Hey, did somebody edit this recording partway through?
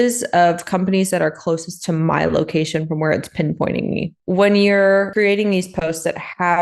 yes; 2 cuts; at 4.2 s, 5.1 s

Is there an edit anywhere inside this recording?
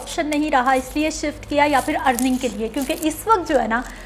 no; 0 cuts

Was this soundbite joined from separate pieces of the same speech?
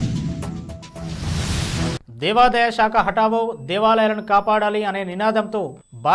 yes; 1 cut; at 2.0 s

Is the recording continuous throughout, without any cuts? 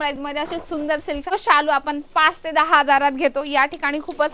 no; 1 cut; at 1.3 s

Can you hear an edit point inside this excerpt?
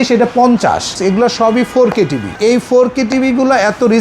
yes; 2 cuts; at 1.0 s, 2.4 s

